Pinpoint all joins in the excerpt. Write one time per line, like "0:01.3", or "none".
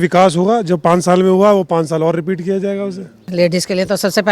0:03.3